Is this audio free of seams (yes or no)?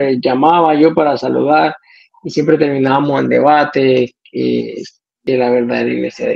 no